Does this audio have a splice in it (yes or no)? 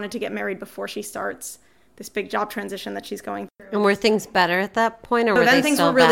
no